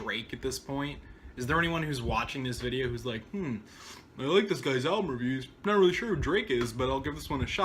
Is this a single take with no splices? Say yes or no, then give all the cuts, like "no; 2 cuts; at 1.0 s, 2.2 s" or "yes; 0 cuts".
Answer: no; 1 cut; at 5.7 s